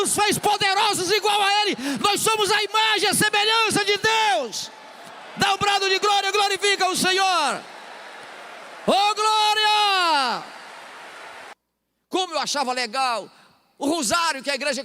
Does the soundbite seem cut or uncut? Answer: cut